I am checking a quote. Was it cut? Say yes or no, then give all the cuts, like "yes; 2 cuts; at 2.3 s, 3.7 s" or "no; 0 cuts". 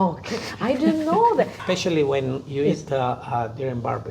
yes; 1 cut; at 1.6 s